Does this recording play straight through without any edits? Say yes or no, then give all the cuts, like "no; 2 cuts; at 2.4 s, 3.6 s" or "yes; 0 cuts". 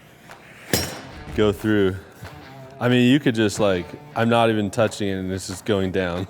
no; 1 cut; at 1.1 s